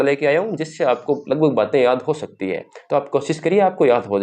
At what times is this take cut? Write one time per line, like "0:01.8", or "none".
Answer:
none